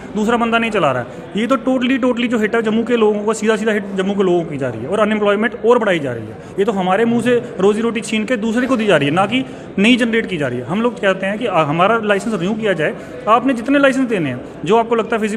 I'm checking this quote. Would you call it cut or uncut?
uncut